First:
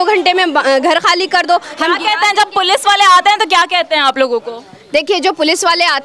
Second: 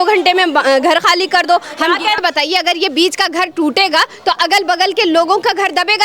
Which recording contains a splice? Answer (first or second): second